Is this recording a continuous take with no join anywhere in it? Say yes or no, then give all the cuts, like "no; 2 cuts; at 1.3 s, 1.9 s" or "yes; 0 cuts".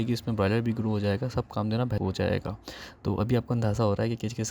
no; 1 cut; at 2.0 s